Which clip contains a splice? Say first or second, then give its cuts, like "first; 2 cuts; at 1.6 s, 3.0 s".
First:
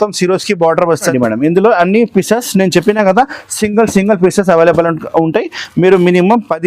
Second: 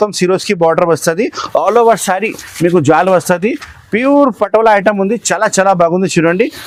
first; 1 cut; at 1.1 s